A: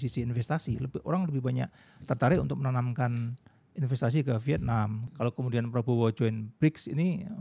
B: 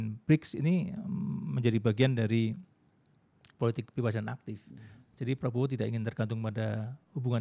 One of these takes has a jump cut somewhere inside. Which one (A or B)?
A